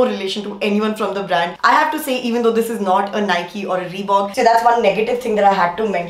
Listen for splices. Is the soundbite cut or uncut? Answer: cut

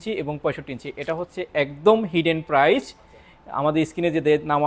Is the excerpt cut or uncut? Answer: uncut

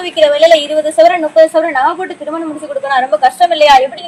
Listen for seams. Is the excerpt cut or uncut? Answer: uncut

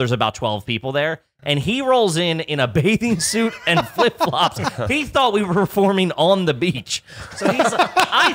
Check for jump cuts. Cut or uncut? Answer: uncut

